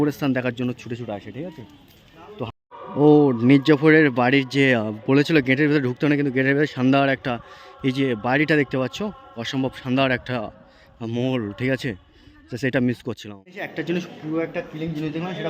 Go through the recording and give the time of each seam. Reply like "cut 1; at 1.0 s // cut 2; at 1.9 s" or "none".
cut 1; at 2.8 s // cut 2; at 13.4 s

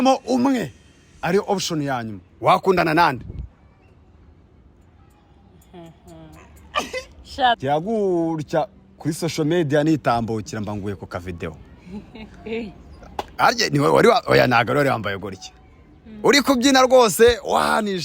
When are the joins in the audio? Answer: cut 1; at 7.6 s

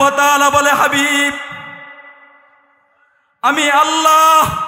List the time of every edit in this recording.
none

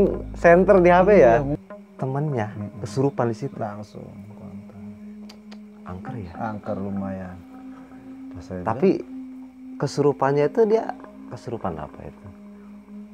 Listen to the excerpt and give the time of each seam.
cut 1; at 1.5 s

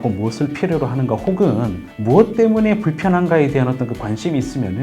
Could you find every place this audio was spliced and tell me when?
cut 1; at 1.9 s

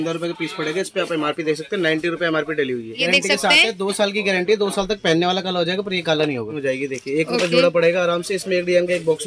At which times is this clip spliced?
cut 1; at 2.9 s // cut 2; at 6.6 s

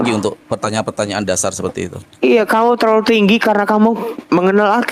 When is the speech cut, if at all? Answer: none

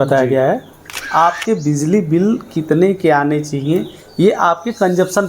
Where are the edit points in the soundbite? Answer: cut 1; at 1.0 s

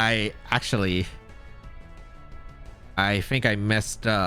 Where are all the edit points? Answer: none

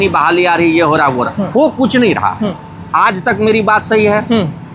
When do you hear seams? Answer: none

